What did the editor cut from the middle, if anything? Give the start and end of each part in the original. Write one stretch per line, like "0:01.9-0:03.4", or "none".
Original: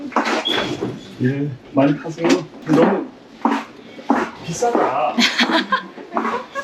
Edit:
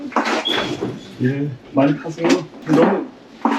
none